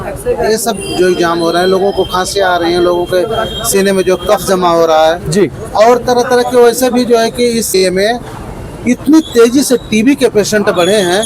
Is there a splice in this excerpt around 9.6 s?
no; 1 cut; at 7.8 s

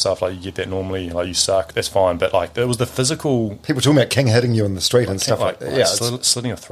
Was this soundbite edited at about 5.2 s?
no; 2 cuts; at 1.7 s, 3.6 s

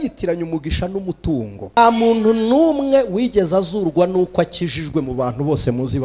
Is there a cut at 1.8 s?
yes; 1 cut; at 1.8 s

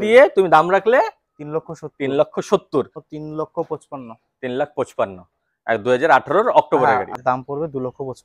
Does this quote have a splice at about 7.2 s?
yes; 2 cuts; at 3.0 s, 7.2 s

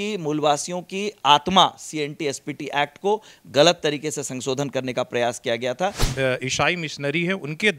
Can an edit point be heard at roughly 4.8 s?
no; 1 cut; at 6.1 s

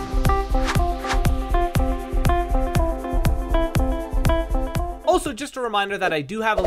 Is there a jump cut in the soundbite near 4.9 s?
yes; 1 cut; at 4.9 s

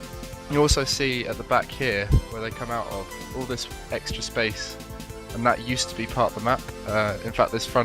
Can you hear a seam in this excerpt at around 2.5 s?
yes; 1 cut; at 2.5 s

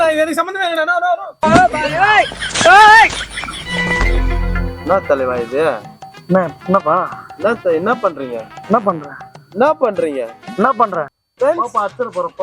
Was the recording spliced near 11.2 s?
yes; 1 cut; at 11.2 s

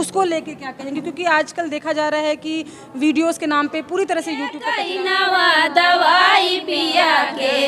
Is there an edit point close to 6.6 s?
no; 1 cut; at 4.7 s

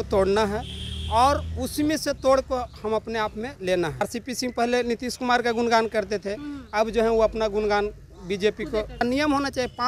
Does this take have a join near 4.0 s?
yes; 2 cuts; at 4.0 s, 9.0 s

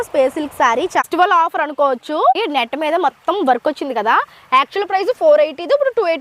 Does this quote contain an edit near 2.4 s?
yes; 2 cuts; at 1.0 s, 2.4 s

